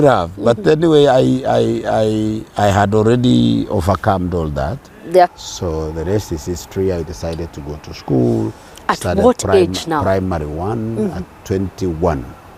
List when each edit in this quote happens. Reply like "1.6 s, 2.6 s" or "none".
5.3 s